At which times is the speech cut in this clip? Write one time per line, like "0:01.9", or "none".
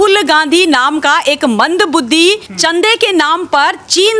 0:02.5